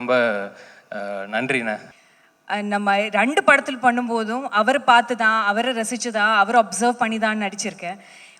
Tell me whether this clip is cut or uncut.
cut